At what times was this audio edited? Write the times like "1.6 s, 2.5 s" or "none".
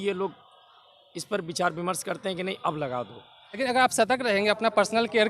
3.6 s

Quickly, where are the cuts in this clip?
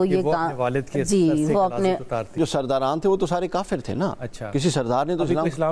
2.4 s

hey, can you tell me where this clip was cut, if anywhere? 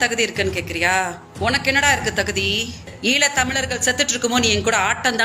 1.6 s, 2.9 s

